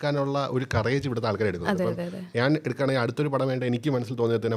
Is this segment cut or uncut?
uncut